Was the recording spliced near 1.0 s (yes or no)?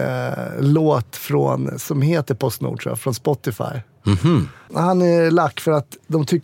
no